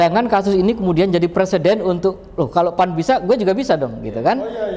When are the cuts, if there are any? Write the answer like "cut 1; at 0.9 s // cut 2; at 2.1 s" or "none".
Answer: none